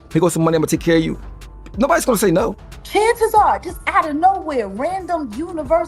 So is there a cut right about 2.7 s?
yes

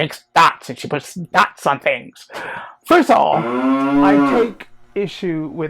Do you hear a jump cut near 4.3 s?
yes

